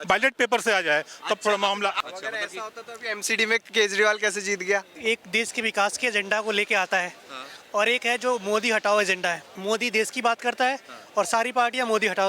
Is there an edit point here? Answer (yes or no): yes